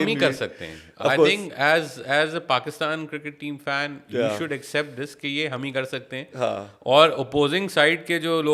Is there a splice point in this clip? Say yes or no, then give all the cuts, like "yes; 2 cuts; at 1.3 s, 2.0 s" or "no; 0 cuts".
no; 0 cuts